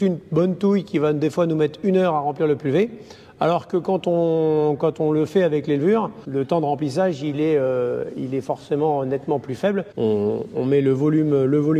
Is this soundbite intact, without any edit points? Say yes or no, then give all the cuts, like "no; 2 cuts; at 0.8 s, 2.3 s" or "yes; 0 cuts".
no; 2 cuts; at 6.2 s, 9.9 s